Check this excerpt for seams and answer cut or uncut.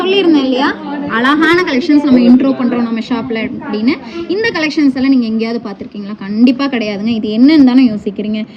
uncut